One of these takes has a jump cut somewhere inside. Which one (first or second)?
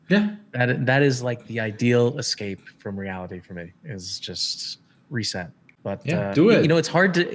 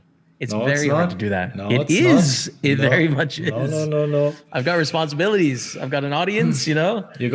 first